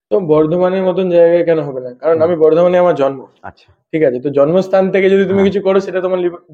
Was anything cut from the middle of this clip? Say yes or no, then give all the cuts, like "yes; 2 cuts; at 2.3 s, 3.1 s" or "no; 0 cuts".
no; 0 cuts